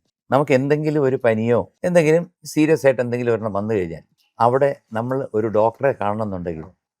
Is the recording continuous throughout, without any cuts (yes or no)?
no